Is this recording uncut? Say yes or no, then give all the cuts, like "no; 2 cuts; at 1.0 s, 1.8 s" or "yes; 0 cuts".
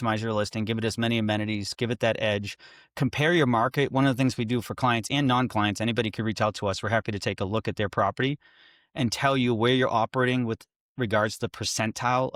yes; 0 cuts